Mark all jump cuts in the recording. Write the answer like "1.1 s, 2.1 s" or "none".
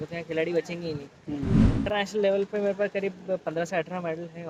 1.7 s

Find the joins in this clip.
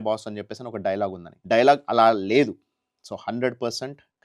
1.3 s

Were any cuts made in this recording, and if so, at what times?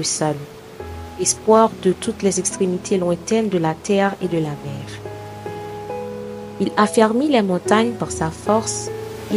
4.6 s, 5.9 s

